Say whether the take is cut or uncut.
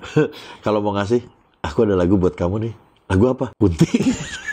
cut